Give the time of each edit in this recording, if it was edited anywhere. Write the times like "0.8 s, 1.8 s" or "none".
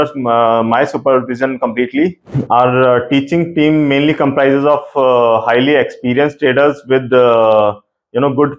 2.3 s